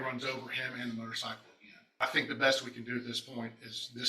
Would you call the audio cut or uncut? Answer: cut